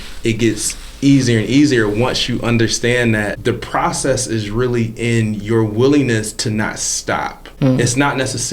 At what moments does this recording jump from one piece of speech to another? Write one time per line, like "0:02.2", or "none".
0:03.4
0:07.4